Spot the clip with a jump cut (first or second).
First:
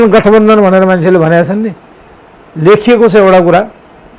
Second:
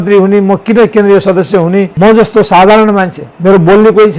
second